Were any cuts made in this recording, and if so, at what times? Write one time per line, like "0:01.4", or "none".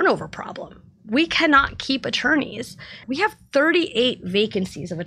0:03.0